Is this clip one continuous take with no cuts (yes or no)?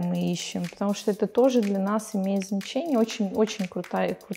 yes